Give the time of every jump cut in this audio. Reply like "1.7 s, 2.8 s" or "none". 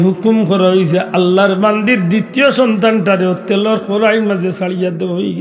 none